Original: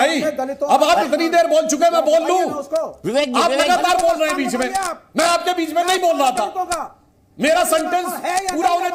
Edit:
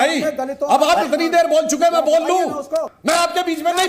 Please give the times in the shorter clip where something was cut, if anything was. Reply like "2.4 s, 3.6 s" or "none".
2.9 s